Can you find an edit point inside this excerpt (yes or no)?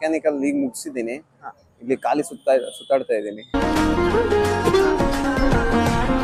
no